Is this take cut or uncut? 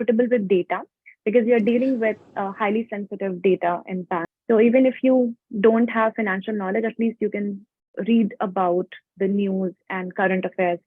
cut